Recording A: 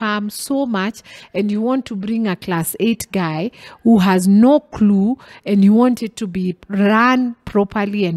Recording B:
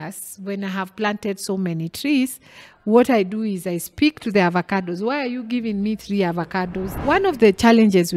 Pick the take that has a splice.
B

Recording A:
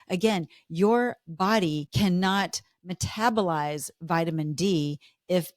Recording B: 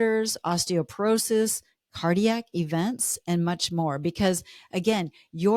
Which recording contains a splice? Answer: A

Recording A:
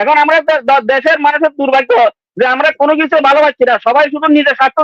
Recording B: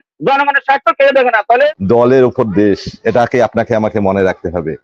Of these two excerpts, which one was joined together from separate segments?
B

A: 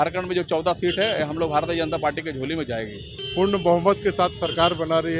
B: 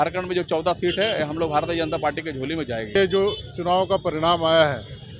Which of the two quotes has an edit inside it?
B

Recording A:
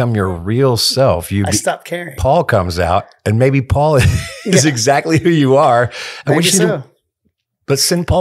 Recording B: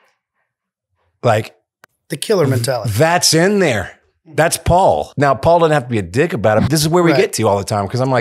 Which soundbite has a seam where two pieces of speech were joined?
B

